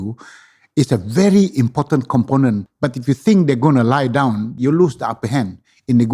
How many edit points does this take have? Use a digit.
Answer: 2